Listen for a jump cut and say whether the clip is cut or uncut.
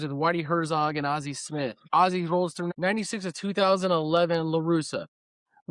cut